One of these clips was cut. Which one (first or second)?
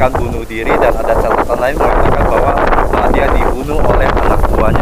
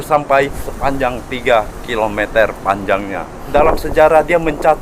second